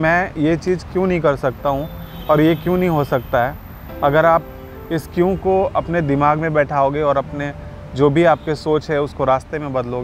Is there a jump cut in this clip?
no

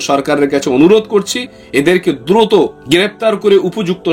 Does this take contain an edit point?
no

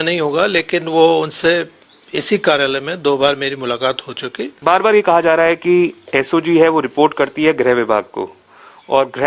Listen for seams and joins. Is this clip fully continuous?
no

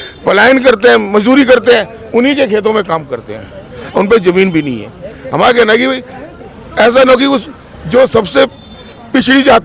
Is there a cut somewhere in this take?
no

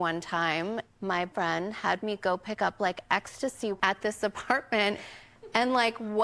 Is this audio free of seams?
no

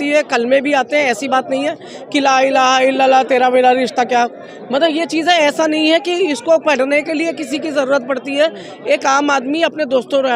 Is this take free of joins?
yes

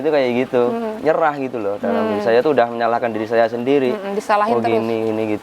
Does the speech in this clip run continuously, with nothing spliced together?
no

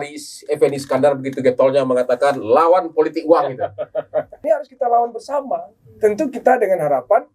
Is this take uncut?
no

